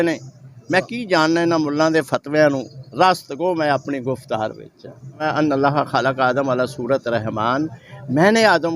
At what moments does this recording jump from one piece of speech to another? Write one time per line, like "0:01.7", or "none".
0:05.2